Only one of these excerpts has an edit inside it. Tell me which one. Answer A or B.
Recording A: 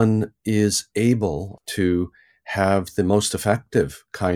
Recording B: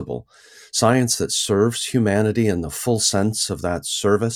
A